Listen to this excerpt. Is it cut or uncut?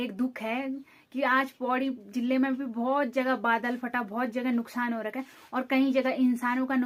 uncut